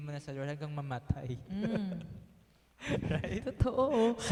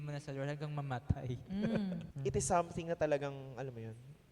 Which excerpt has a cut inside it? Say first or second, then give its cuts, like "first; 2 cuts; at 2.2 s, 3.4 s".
second; 1 cut; at 2.1 s